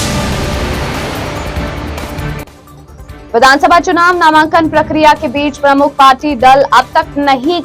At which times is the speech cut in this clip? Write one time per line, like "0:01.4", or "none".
0:02.5